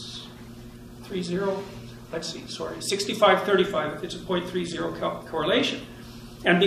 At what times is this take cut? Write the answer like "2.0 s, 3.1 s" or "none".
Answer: 1.1 s